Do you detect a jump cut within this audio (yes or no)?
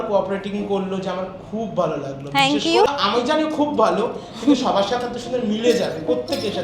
yes